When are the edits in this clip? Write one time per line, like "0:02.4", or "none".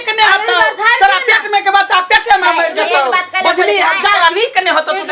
0:04.2

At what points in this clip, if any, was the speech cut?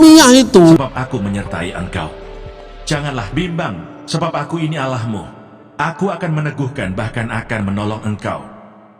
0:01.0

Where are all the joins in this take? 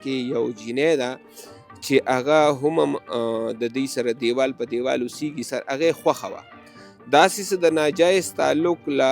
0:05.4

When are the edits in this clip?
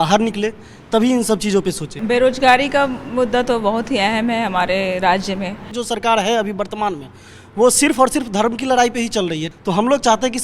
0:02.0
0:05.7
0:09.5

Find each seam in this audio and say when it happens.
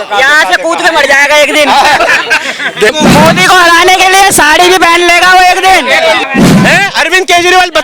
0:02.9
0:06.3

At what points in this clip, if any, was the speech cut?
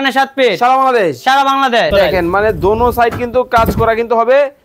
0:01.9

